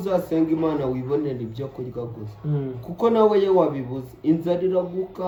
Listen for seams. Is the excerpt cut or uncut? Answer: uncut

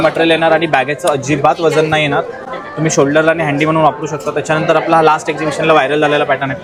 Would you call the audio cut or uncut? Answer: uncut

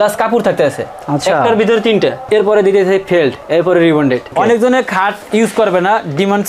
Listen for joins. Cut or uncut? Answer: cut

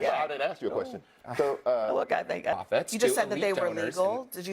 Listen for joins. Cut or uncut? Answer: cut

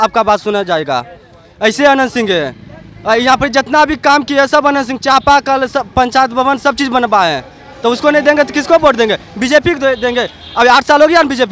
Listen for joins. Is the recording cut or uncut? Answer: uncut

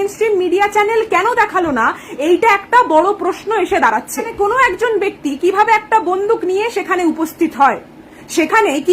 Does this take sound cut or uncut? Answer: cut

